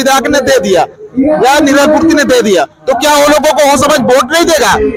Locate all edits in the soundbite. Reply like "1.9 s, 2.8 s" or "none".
none